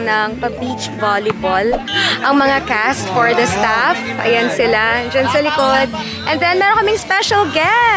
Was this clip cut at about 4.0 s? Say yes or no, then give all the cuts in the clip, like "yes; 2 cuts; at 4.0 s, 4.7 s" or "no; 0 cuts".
no; 0 cuts